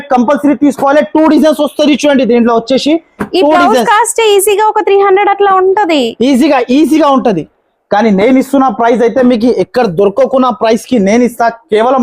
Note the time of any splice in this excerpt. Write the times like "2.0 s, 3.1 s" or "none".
none